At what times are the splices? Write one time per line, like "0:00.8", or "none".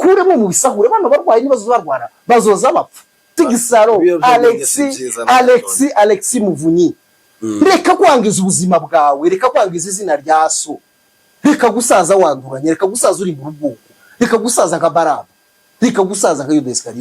0:03.3